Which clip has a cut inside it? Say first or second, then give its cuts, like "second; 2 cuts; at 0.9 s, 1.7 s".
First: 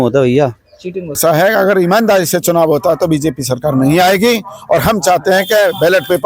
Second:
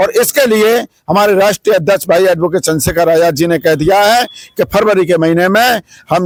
first; 1 cut; at 1.2 s